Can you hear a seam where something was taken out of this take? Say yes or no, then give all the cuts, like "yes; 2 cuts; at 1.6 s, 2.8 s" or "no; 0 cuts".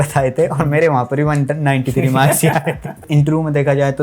yes; 1 cut; at 3.0 s